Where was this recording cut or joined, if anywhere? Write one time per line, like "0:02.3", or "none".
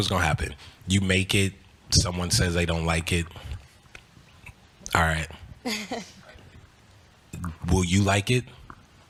none